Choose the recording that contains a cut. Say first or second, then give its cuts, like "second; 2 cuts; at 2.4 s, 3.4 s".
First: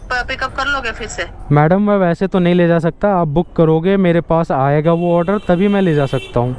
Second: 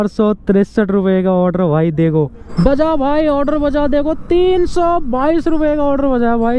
second; 1 cut; at 2.4 s